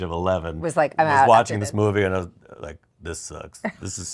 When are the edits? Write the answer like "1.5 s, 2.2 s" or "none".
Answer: 2.9 s